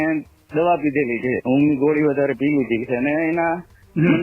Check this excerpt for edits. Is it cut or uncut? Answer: cut